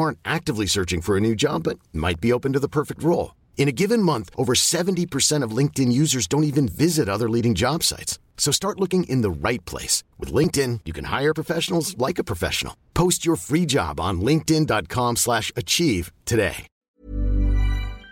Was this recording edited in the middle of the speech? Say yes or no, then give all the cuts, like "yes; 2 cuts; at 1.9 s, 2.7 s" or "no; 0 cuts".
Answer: yes; 1 cut; at 17.0 s